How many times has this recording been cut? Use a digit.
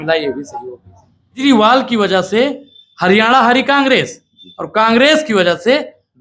1